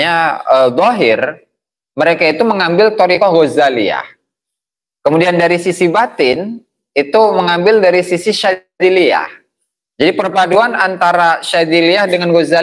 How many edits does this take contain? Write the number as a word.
zero